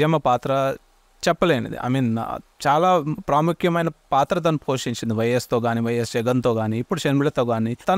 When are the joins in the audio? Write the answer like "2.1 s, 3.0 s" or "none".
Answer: none

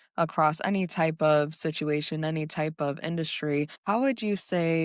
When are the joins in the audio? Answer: 3.8 s

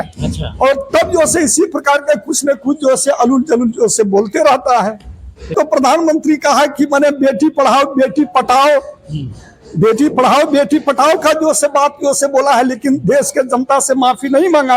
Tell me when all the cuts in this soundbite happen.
5.5 s

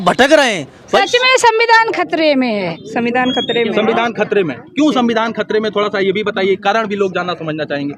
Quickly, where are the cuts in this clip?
0.9 s, 2.8 s

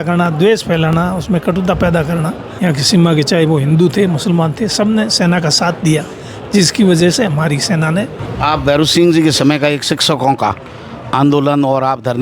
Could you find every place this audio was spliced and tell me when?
2.4 s, 8.2 s

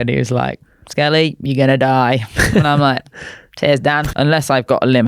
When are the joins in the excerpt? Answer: 4.1 s

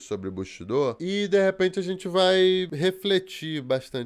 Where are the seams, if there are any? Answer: 1.0 s, 2.7 s

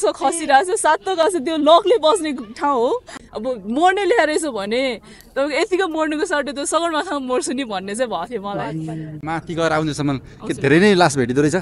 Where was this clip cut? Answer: 3.2 s, 9.2 s

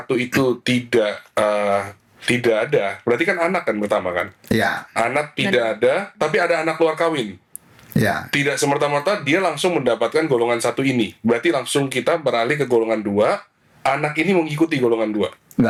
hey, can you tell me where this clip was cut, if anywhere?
none

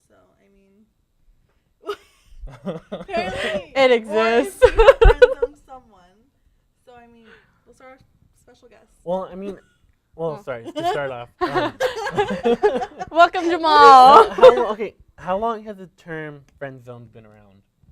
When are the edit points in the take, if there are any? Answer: 7.7 s

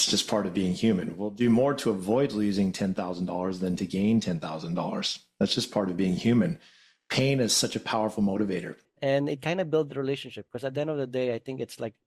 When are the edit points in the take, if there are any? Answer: 8.9 s

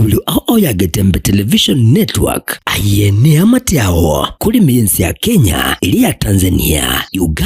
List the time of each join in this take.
none

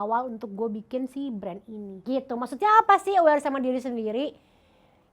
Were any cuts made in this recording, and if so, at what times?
1.9 s

